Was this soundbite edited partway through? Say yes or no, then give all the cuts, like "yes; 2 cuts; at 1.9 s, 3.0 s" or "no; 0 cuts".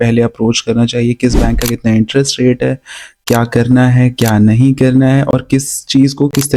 no; 0 cuts